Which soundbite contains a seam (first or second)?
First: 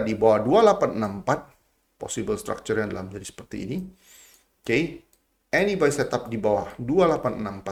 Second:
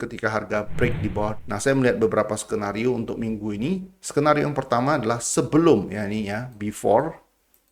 second